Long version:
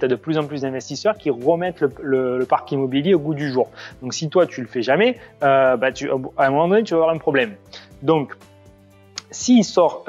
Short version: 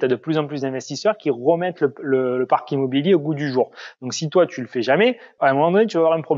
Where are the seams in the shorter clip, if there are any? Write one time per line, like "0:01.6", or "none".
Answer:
0:05.3

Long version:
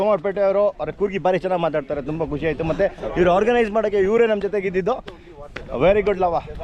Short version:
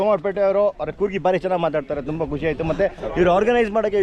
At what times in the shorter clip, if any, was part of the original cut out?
none

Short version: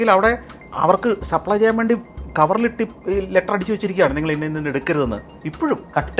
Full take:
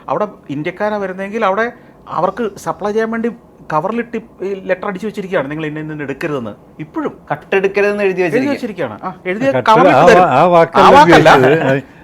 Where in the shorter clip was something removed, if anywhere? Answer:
none

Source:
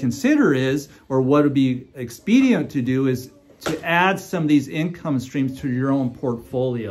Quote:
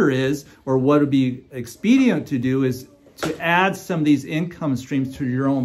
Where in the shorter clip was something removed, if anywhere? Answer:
none

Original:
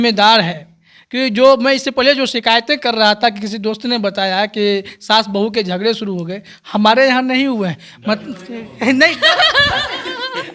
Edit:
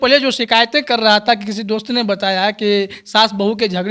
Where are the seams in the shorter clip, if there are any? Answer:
none

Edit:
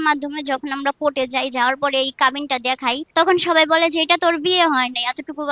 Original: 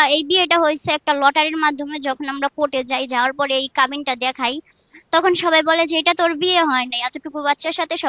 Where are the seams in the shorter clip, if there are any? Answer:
0:03.0

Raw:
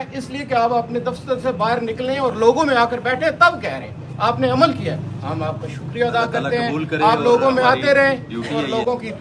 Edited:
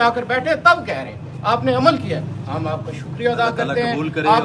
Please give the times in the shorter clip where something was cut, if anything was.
none

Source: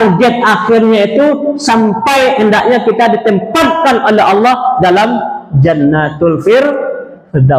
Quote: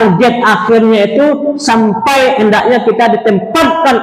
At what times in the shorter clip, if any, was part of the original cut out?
none

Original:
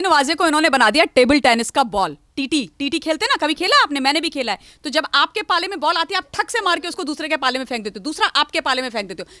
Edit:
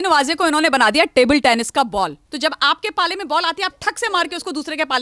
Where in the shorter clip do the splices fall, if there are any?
0:02.2

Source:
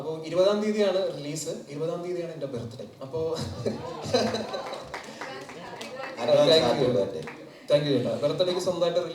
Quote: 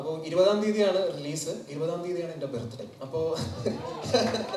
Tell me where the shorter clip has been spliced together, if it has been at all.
none

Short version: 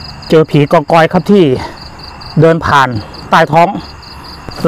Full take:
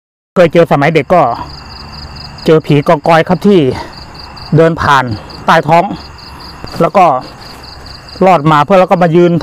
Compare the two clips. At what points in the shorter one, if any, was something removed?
none

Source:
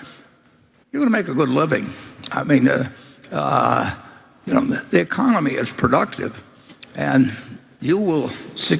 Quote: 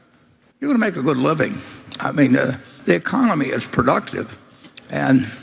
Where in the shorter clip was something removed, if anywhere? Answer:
0:02.8

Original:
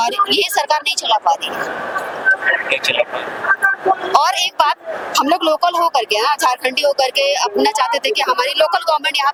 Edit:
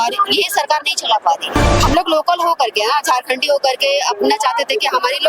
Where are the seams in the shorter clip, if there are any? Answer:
0:01.6

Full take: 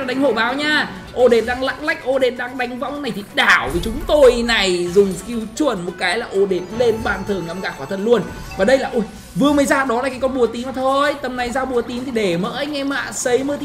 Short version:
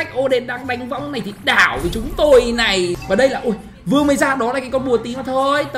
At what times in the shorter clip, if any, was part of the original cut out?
0:03.0

